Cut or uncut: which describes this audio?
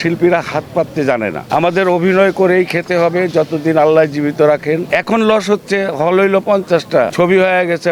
cut